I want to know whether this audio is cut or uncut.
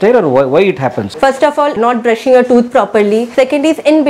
cut